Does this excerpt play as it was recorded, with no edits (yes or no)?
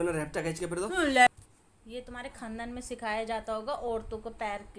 no